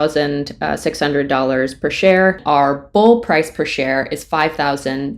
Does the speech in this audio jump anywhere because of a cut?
yes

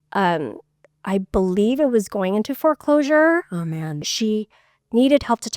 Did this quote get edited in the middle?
yes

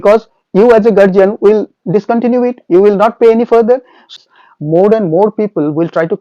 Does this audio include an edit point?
yes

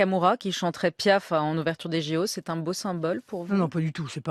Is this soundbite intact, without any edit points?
yes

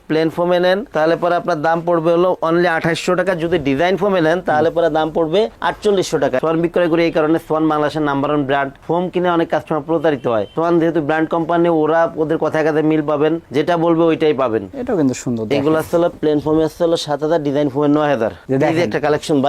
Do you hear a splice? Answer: yes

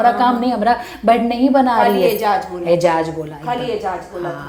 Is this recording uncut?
yes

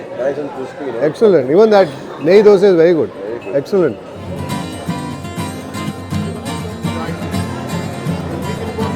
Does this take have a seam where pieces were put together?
no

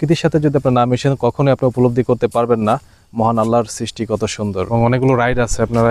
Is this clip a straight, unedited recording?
no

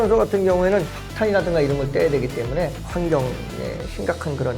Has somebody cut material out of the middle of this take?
yes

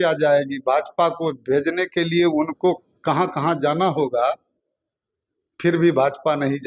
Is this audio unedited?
yes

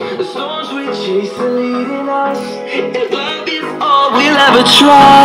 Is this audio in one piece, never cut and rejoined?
yes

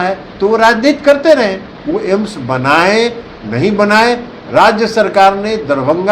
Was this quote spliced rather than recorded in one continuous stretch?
yes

